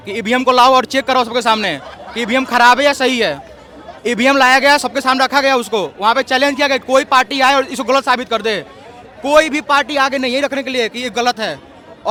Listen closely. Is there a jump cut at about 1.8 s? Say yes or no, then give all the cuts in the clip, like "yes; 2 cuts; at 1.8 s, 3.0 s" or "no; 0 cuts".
no; 0 cuts